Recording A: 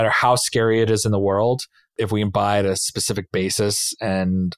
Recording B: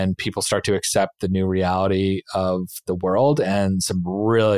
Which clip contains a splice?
A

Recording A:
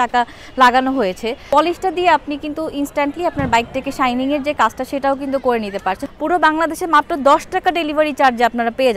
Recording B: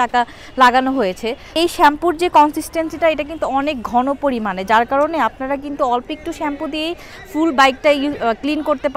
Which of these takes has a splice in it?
A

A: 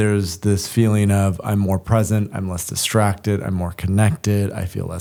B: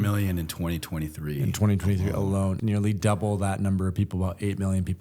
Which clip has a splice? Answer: B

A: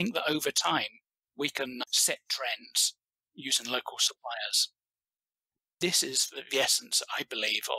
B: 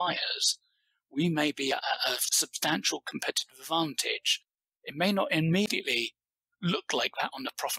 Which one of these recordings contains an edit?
B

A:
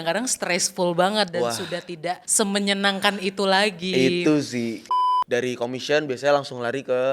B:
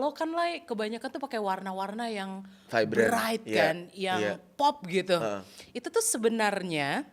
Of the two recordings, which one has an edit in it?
A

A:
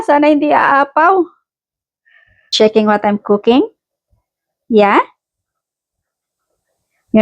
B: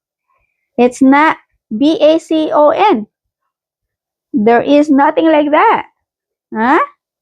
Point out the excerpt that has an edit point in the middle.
A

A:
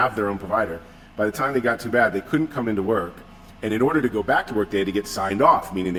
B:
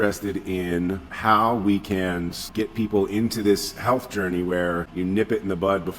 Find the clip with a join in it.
B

